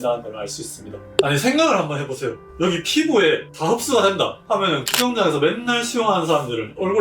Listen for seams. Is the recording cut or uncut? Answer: cut